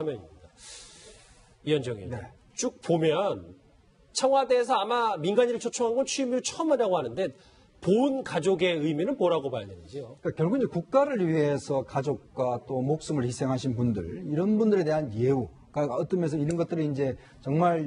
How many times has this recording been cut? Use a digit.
0